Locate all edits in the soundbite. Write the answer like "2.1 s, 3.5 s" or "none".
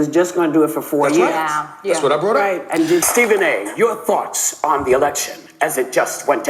3.1 s